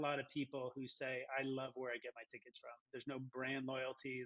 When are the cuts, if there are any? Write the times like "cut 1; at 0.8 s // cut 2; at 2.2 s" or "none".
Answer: none

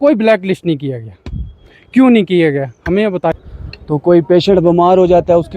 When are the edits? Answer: cut 1; at 3.5 s

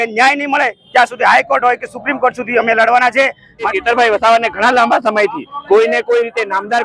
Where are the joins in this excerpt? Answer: cut 1; at 3.6 s

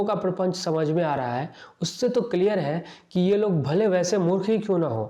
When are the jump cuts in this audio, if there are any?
none

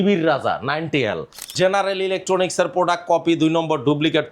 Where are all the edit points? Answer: cut 1; at 1.5 s

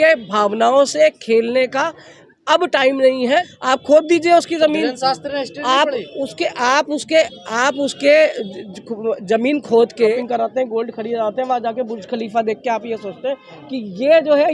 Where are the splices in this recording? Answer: cut 1; at 3.5 s // cut 2; at 10.1 s

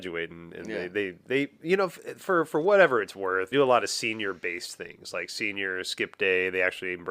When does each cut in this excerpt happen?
cut 1; at 3.5 s

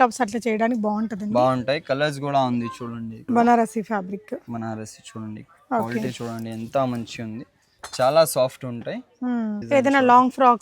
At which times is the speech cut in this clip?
cut 1; at 3.2 s // cut 2; at 9.6 s

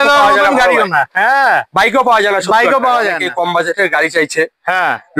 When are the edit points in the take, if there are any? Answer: cut 1; at 3.2 s

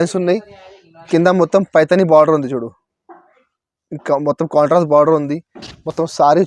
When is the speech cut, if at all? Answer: none

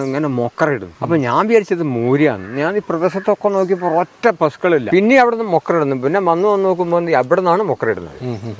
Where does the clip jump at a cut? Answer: cut 1; at 0.9 s // cut 2; at 4.9 s

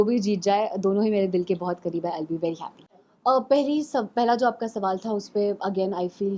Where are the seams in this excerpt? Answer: cut 1; at 2.8 s

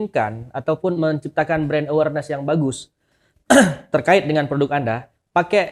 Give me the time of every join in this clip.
none

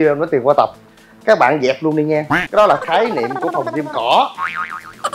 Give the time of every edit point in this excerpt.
cut 1; at 2.4 s

